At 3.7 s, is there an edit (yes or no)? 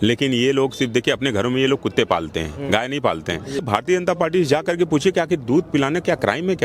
yes